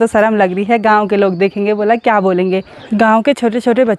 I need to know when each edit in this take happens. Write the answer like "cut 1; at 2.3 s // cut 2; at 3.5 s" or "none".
cut 1; at 2.7 s